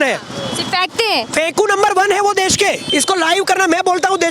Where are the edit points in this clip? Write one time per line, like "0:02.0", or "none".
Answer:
0:02.8